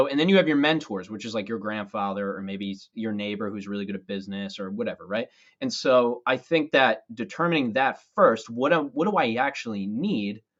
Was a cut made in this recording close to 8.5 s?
no; 0 cuts

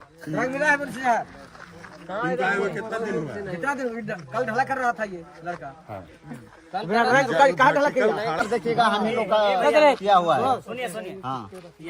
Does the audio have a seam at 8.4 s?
yes; 1 cut; at 8.4 s

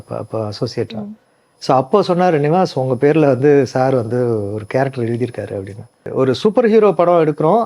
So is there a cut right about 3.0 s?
no; 1 cut; at 6.1 s

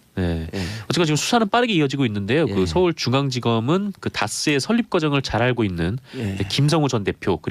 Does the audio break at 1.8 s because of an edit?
yes; 1 cut; at 1.8 s

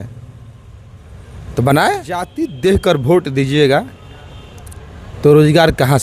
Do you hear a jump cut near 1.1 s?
no; 1 cut; at 2.4 s

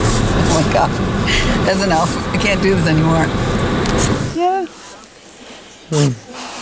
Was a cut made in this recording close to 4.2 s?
yes; 1 cut; at 4.2 s

